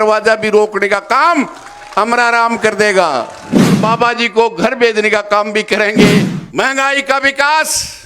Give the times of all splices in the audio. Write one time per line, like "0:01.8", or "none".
0:03.8
0:06.3